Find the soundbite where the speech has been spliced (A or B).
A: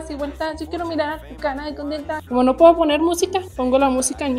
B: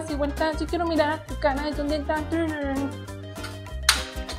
A